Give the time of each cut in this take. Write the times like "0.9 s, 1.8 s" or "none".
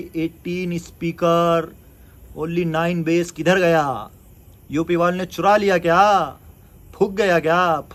none